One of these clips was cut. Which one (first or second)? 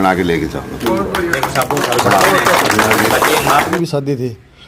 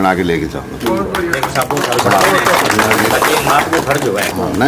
first